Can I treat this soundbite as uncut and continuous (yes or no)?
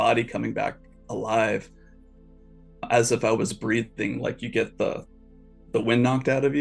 yes